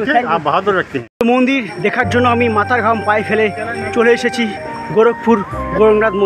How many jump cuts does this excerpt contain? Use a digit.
1